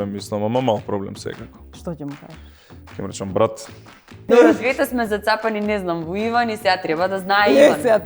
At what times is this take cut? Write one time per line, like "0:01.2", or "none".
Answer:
0:04.2